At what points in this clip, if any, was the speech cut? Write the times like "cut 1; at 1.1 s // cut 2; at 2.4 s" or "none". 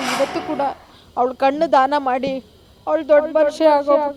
none